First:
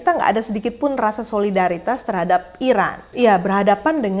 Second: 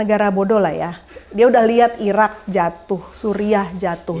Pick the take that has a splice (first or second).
first